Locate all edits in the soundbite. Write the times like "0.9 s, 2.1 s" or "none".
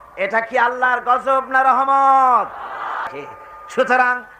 3.1 s